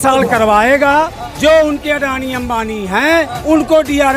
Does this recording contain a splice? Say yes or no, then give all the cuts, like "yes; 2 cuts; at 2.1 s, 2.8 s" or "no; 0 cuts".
yes; 2 cuts; at 1.2 s, 3.4 s